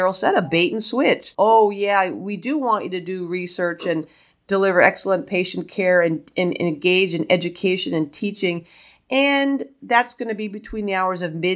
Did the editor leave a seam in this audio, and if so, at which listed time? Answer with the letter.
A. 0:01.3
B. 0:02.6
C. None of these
A